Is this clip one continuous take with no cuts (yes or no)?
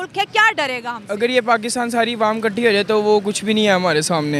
yes